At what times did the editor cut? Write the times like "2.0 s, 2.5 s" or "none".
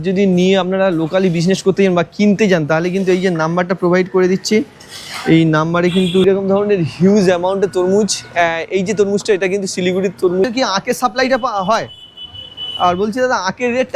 6.3 s, 10.4 s